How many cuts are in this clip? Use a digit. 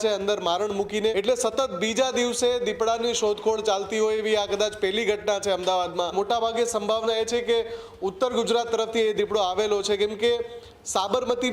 2